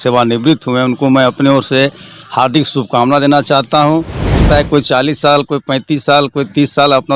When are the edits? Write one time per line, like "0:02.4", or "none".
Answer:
0:04.4